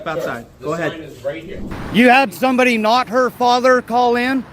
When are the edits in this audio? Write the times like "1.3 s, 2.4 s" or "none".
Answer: 1.7 s